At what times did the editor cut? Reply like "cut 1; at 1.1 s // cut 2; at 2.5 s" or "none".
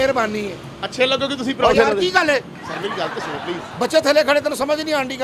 cut 1; at 3.6 s